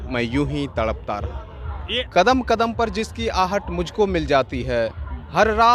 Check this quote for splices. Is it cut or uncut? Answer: cut